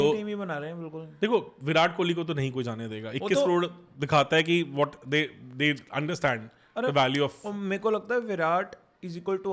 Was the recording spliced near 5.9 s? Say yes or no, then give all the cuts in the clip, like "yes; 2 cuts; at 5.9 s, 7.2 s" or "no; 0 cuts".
no; 0 cuts